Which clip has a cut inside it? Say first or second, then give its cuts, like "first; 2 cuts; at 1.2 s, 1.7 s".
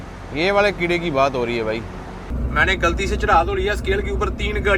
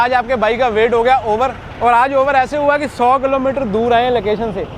first; 1 cut; at 2.2 s